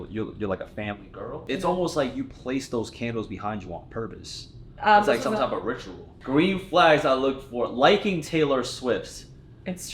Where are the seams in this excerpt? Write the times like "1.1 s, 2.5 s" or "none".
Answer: 1.5 s, 6.1 s